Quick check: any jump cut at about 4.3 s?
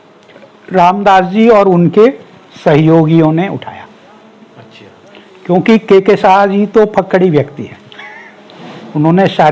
no; 0 cuts

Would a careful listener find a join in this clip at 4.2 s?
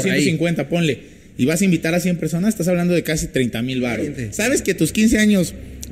yes; 1 cut; at 4.2 s

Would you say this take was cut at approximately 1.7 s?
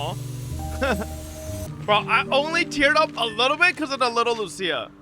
yes; 1 cut; at 1.7 s

